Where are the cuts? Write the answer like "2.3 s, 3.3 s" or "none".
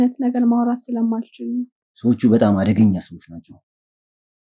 1.8 s